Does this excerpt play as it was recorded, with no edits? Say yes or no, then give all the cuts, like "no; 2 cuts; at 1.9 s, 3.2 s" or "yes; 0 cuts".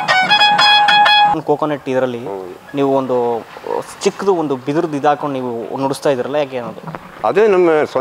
no; 1 cut; at 1.3 s